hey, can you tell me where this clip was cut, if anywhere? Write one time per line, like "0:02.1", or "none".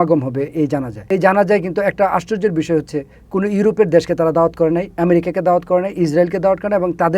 0:00.9